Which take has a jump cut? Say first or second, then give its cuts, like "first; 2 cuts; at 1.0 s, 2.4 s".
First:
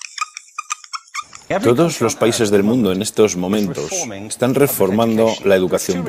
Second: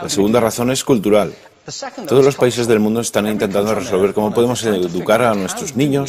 second; 1 cut; at 1.3 s